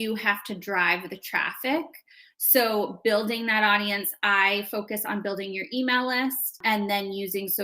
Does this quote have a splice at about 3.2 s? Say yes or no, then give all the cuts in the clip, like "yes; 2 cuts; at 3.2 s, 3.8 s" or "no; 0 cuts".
no; 1 cut; at 6.6 s